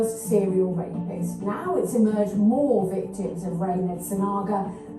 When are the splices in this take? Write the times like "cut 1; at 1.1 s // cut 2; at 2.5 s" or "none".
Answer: none